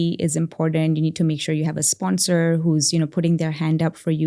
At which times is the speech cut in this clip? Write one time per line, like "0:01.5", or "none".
none

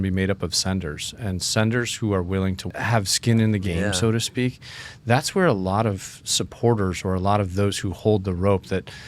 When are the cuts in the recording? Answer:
0:02.6
0:03.6

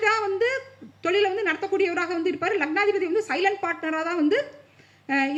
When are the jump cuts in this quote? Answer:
none

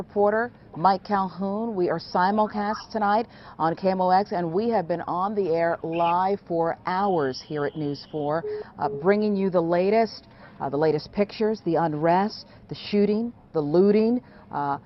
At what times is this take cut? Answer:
none

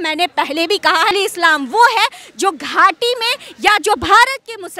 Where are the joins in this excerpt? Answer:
0:01.1

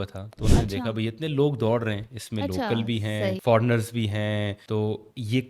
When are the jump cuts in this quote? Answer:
0:03.4
0:04.6

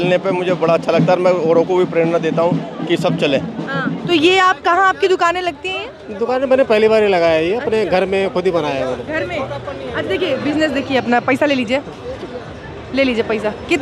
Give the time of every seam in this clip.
0:04.0

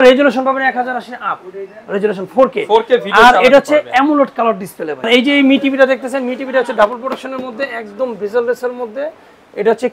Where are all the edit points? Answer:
0:05.1

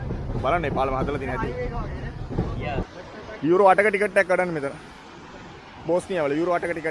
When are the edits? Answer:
0:02.9

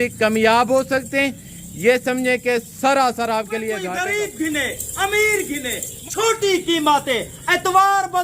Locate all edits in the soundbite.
0:03.9
0:05.9

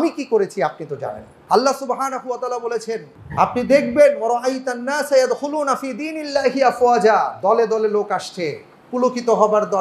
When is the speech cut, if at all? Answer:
0:01.3
0:03.2

